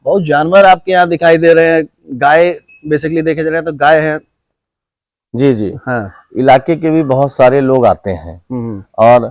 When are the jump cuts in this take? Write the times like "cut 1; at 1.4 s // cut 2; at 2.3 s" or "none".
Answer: none